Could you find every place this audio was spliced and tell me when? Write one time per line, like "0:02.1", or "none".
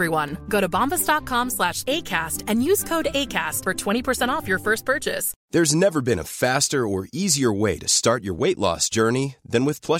0:05.3